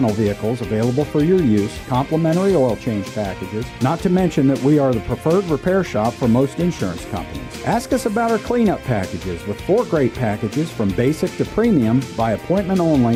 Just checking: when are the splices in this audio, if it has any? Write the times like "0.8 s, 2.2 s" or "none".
none